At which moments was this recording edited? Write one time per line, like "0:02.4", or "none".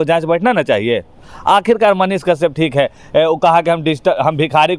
none